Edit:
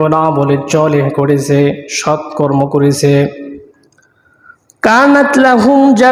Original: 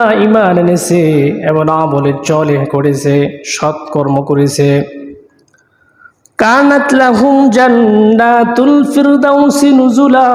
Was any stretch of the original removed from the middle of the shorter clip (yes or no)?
no